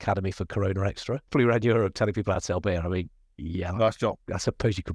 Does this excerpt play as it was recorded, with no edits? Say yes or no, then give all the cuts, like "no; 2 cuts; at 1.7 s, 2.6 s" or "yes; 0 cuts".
no; 1 cut; at 1.2 s